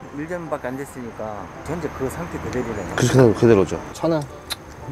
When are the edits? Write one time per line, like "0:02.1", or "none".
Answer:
0:01.5
0:03.8